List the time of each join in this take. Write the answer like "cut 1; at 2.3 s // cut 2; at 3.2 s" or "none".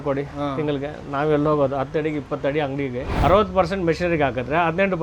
cut 1; at 3.1 s